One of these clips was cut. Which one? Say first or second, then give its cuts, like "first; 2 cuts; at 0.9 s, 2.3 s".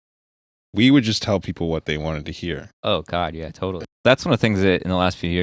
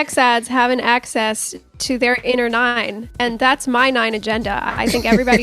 first; 1 cut; at 3.8 s